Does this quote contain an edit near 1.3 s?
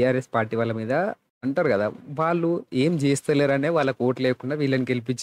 yes; 1 cut; at 1.3 s

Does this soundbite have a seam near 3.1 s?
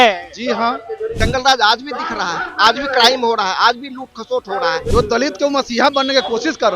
no; 2 cuts; at 1.1 s, 4.9 s

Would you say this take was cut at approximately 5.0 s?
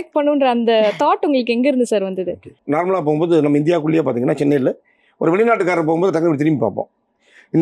no; 1 cut; at 2.5 s

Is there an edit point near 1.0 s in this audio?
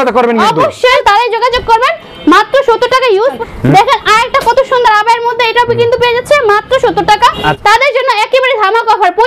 yes; 3 cuts; at 1.0 s, 3.4 s, 7.5 s

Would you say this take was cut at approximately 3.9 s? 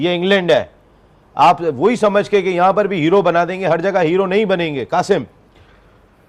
no; 0 cuts

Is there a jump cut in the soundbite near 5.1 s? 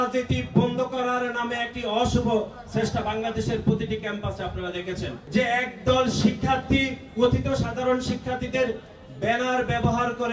yes; 1 cut; at 5.1 s

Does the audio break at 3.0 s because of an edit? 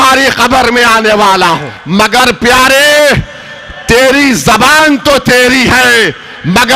no; 1 cut; at 1.7 s

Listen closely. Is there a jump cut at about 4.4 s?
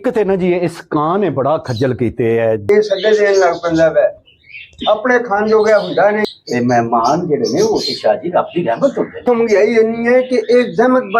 no; 3 cuts; at 2.7 s, 6.3 s, 9.2 s

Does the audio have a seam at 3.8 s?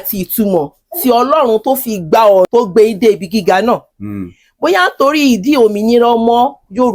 no; 1 cut; at 2.5 s

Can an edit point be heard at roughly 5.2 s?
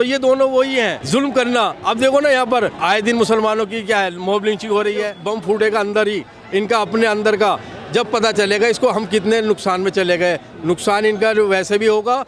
yes; 3 cuts; at 1.0 s, 2.8 s, 5.2 s

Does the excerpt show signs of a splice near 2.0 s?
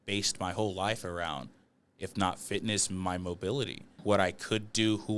no; 1 cut; at 4.0 s

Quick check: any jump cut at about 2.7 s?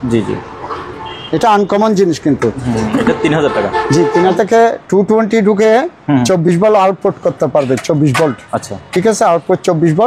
no; 1 cut; at 4.3 s

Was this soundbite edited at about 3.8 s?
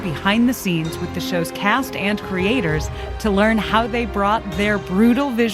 no; 0 cuts

